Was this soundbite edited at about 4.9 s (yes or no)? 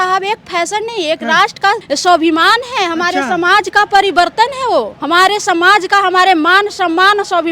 yes